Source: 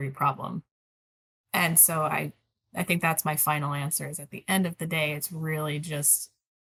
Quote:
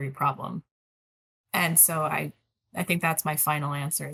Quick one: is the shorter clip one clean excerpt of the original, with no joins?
yes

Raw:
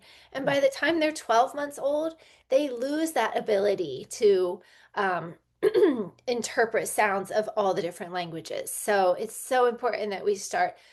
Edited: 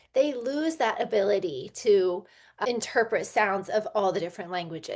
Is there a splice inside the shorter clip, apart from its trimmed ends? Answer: yes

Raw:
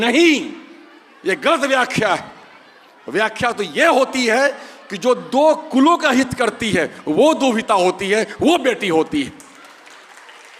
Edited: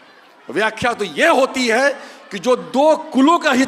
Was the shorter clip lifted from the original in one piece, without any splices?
yes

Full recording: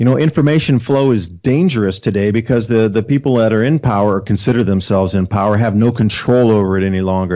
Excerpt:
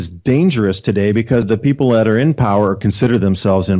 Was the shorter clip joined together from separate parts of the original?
yes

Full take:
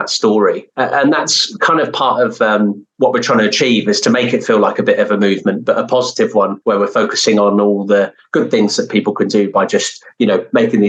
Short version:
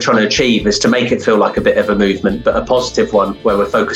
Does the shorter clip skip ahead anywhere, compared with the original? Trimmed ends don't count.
no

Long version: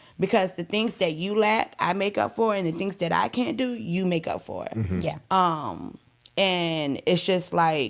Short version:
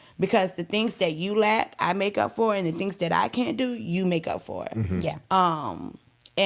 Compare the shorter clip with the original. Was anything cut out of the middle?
no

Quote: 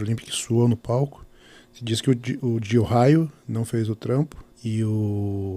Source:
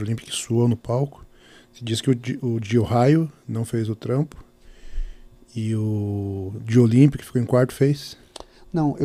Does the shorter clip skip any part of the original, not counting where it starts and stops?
yes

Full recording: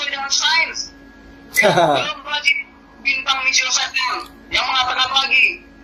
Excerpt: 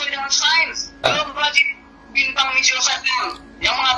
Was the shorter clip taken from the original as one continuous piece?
no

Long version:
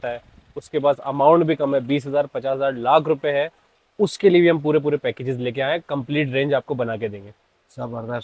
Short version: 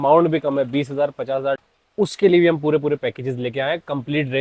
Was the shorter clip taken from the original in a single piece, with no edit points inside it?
no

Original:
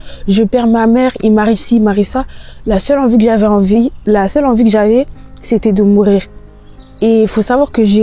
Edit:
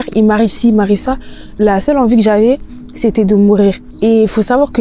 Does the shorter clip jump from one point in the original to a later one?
yes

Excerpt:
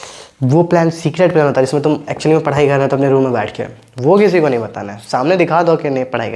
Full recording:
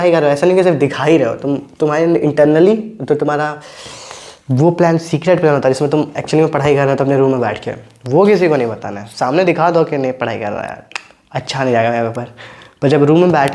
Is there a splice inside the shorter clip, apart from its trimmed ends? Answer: no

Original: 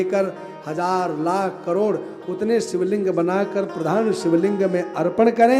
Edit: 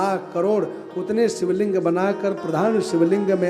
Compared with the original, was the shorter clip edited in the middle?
no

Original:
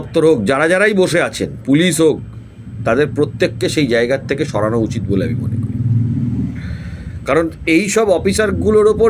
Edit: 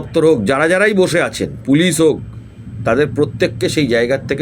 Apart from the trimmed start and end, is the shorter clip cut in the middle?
no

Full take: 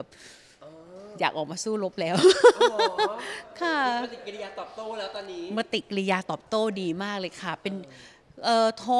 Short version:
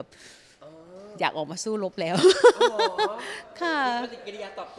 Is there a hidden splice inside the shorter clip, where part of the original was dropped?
no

